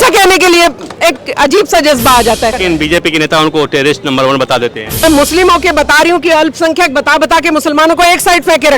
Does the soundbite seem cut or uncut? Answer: cut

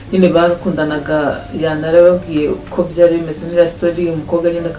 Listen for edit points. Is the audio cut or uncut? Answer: uncut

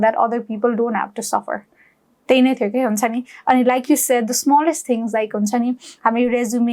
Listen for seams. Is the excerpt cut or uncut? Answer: uncut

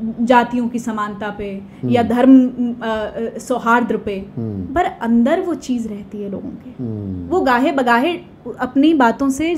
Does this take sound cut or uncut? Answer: uncut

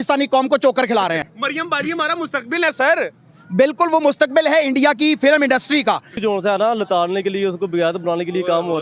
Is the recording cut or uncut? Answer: cut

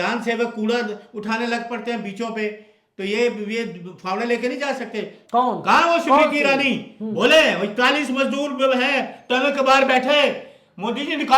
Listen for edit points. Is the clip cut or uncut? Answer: cut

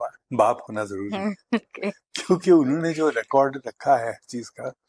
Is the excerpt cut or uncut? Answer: uncut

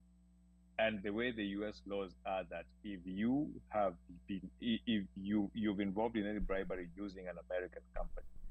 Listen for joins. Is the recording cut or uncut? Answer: uncut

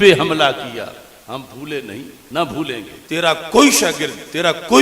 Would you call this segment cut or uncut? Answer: cut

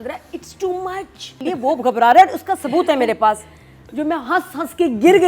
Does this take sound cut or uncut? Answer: cut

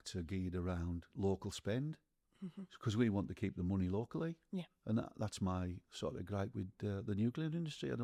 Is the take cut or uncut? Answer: uncut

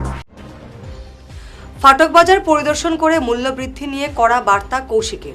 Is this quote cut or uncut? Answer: cut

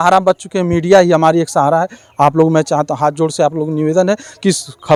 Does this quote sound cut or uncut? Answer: uncut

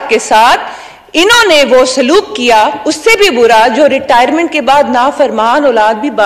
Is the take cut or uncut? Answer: uncut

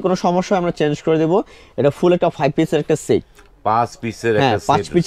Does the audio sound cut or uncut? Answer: uncut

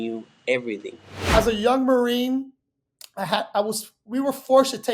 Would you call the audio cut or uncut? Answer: cut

